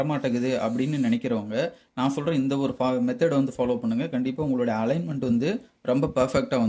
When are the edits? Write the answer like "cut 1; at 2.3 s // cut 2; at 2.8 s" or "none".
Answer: none